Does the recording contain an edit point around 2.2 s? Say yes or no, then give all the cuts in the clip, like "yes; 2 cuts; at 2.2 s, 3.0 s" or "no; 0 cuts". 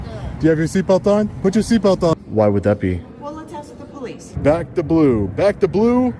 yes; 2 cuts; at 2.2 s, 4.4 s